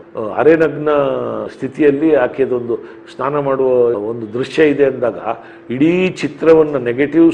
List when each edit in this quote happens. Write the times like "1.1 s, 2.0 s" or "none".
none